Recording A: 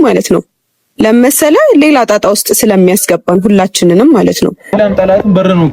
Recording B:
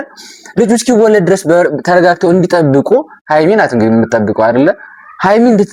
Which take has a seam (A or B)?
A